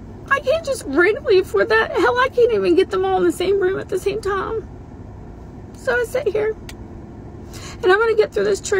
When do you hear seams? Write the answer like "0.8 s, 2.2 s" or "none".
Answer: none